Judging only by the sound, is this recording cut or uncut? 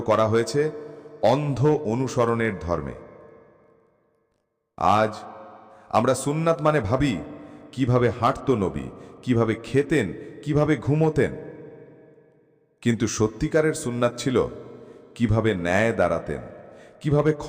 uncut